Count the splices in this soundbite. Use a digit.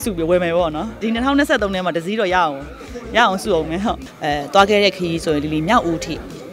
2